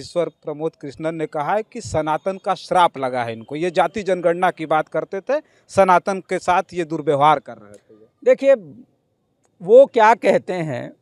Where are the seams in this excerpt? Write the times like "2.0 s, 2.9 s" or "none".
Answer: none